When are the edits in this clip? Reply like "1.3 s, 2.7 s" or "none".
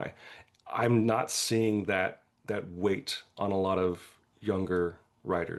none